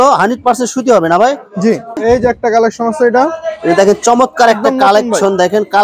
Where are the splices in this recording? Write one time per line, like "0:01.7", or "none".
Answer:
0:01.9